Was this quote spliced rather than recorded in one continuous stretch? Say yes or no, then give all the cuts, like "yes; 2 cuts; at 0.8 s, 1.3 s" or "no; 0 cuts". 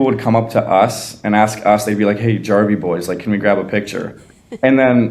no; 0 cuts